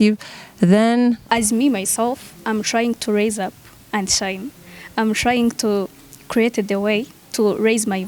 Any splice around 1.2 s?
yes; 1 cut; at 1.2 s

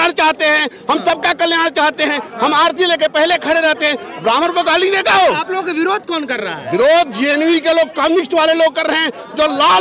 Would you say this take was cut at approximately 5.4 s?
no; 0 cuts

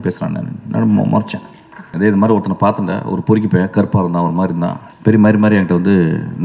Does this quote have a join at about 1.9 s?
yes; 2 cuts; at 1.9 s, 4.9 s

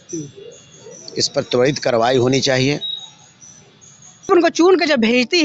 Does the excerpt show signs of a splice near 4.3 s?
yes; 1 cut; at 4.3 s

